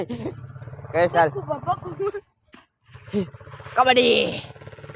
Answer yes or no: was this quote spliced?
no